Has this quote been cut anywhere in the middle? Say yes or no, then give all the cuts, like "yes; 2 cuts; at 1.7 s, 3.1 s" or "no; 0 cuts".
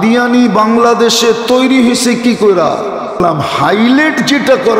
yes; 1 cut; at 3.2 s